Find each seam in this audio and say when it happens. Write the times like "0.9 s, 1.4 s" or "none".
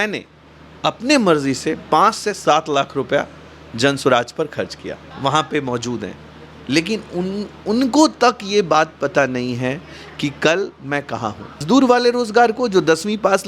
5.1 s, 11.6 s

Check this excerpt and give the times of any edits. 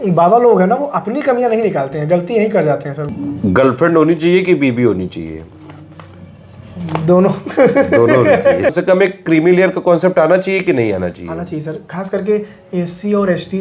3.1 s, 8.8 s

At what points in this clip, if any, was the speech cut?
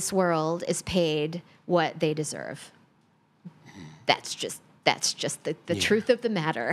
none

